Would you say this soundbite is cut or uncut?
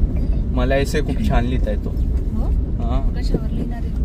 uncut